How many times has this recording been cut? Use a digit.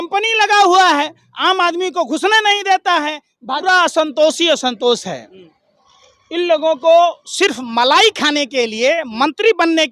1